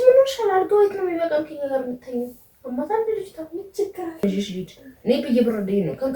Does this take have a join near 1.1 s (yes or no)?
no